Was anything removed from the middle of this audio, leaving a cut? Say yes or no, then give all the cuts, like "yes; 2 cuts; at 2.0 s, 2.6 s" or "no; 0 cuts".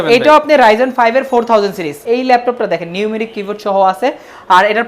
yes; 1 cut; at 2.0 s